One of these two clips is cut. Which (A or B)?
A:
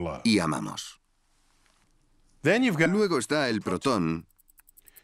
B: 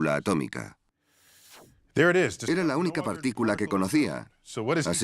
B